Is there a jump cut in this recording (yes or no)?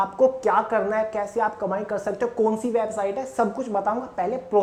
no